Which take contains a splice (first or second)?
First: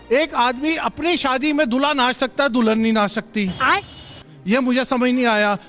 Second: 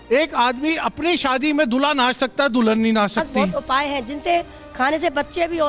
second